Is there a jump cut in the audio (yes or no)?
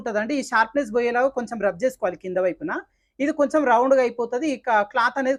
no